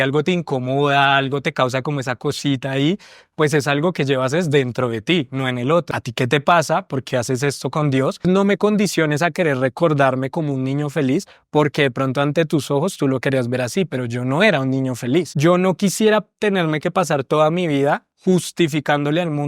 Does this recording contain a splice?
yes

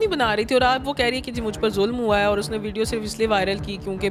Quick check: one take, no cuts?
yes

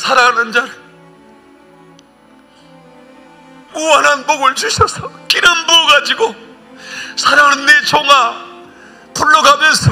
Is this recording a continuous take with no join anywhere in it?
no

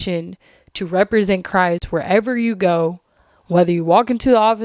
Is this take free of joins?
yes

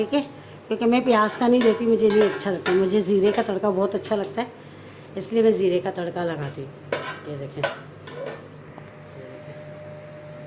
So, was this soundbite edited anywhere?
no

